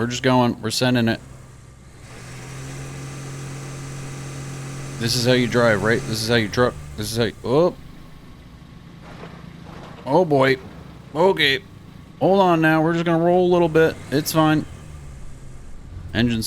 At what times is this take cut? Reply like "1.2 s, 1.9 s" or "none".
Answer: 2.0 s